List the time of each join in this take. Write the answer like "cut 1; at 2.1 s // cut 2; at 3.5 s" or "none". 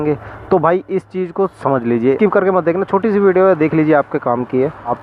cut 1; at 2.2 s